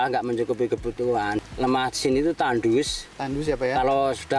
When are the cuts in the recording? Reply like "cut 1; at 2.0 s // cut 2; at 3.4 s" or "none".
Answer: cut 1; at 1.4 s